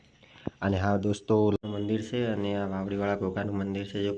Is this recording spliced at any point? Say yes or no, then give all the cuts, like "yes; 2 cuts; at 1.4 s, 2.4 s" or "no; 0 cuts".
yes; 1 cut; at 1.6 s